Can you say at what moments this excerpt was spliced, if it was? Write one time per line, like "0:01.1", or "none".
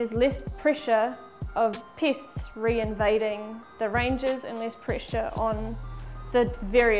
none